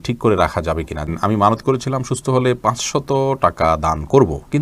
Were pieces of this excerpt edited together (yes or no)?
yes